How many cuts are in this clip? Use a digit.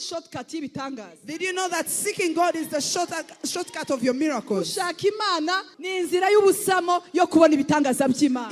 1